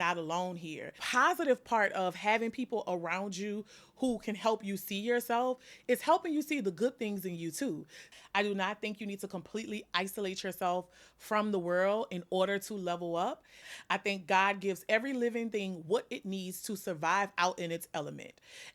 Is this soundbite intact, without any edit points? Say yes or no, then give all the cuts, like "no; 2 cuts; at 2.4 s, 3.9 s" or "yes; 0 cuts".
no; 3 cuts; at 1.0 s, 8.1 s, 13.6 s